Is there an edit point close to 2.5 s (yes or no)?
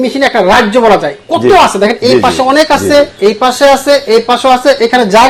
no